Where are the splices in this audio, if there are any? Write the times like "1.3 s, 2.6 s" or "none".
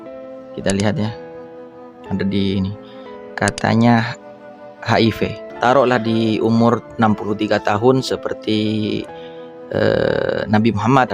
5.4 s